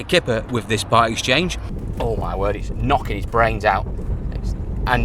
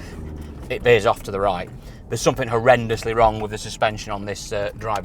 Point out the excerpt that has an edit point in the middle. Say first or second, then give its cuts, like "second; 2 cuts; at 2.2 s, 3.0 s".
first; 1 cut; at 1.6 s